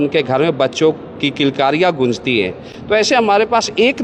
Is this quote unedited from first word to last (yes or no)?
yes